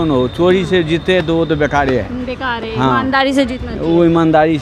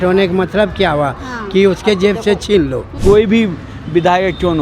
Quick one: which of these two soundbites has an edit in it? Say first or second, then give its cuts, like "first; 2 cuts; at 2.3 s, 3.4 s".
second; 1 cut; at 2.9 s